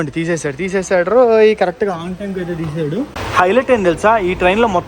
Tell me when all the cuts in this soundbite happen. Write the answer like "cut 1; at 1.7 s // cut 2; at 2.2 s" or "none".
cut 1; at 3.2 s